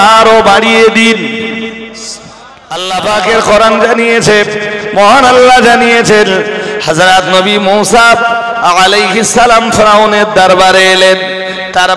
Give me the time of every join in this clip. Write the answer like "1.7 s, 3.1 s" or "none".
2.8 s